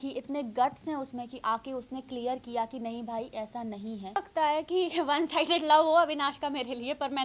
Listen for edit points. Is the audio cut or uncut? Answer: cut